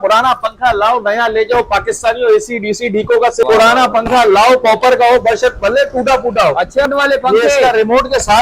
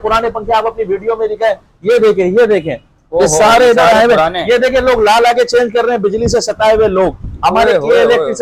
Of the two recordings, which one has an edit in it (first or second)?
first